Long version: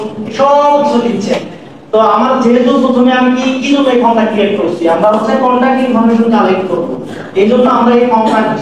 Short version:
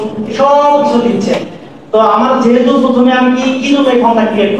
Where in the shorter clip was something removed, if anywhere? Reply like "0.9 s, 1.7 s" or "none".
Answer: none